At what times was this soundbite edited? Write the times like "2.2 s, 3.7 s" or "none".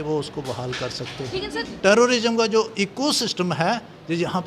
1.5 s